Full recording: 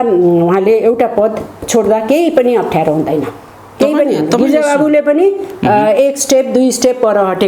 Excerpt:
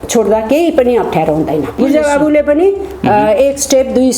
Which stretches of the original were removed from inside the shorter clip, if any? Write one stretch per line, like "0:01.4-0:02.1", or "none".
0:03.4-0:04.4